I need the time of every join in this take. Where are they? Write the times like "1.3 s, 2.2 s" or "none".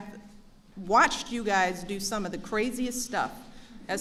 none